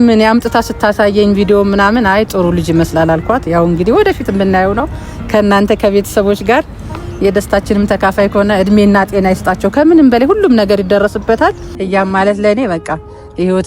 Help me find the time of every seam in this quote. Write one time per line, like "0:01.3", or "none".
0:11.7